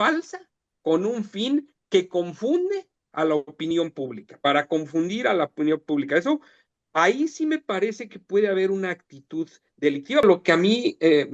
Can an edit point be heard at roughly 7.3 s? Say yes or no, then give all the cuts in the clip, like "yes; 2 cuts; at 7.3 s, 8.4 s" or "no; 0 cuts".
no; 1 cut; at 10.2 s